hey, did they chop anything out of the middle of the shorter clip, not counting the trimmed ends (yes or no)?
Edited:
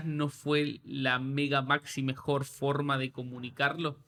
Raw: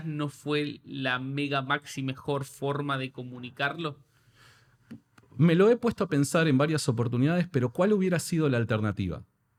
no